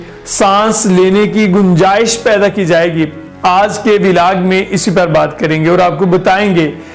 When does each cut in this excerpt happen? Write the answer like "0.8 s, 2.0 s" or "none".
none